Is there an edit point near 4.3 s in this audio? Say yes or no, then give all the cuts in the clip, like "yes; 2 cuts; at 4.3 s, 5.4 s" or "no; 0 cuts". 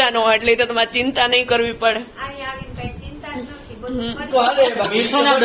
yes; 1 cut; at 4.3 s